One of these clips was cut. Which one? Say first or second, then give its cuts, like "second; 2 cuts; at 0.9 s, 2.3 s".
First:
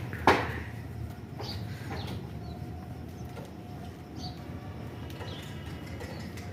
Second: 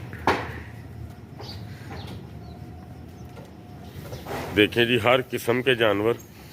second; 1 cut; at 3.9 s